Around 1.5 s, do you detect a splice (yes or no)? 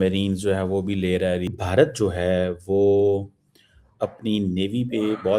yes